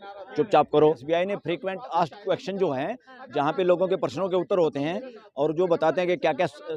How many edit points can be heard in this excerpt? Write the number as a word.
one